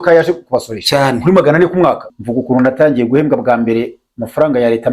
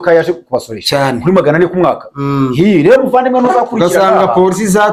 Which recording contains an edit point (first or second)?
first